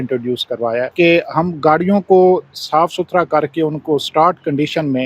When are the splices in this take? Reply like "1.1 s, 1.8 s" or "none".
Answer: 0.9 s